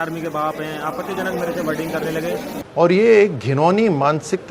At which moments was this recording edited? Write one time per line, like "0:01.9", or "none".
0:02.6